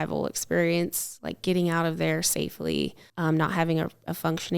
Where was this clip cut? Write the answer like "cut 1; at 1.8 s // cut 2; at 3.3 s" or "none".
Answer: cut 1; at 3.0 s